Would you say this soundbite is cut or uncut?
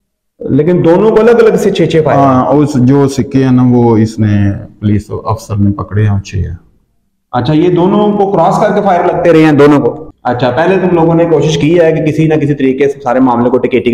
cut